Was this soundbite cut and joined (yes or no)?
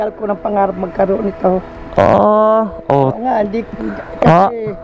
no